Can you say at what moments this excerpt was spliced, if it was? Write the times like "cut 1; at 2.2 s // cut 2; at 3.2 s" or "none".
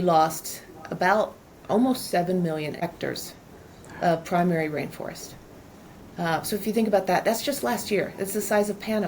cut 1; at 2.8 s